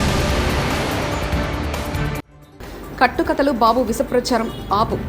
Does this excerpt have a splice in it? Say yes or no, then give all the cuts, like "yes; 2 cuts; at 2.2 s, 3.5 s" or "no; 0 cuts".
yes; 1 cut; at 2.4 s